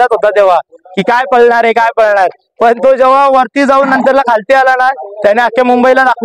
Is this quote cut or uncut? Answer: uncut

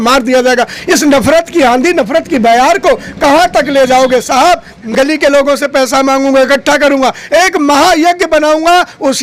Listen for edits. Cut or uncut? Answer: cut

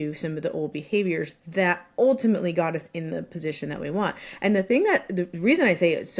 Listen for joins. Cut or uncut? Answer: uncut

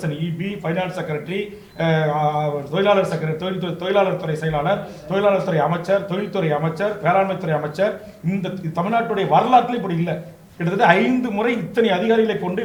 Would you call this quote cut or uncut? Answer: uncut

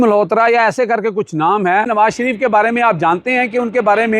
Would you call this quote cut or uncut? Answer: cut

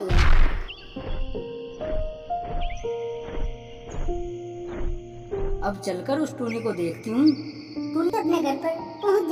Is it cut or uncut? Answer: uncut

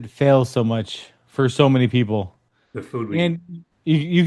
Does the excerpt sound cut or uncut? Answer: uncut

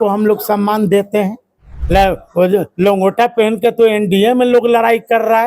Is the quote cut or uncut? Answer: cut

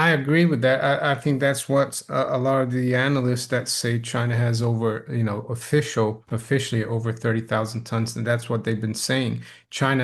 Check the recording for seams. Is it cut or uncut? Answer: cut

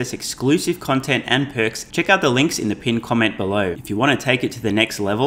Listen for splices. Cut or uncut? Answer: cut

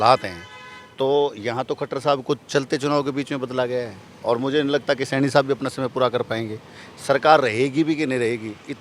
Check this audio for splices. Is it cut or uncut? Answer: uncut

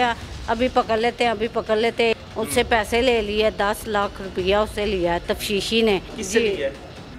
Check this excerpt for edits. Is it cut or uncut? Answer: cut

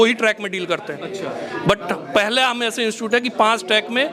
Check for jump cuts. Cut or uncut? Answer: uncut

